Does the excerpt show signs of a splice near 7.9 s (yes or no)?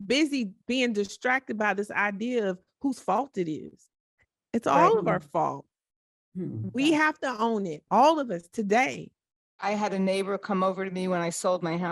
no